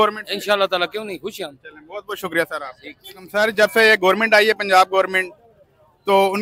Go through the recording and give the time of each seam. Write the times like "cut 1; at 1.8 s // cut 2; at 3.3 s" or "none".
none